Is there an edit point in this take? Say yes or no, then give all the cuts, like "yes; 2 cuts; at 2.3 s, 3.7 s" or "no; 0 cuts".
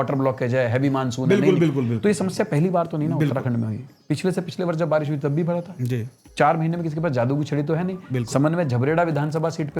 no; 0 cuts